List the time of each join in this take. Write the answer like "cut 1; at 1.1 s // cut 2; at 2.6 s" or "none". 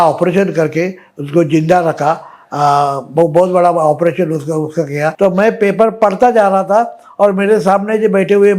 cut 1; at 5.1 s